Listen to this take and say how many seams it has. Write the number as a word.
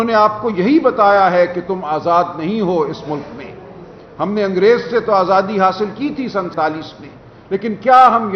one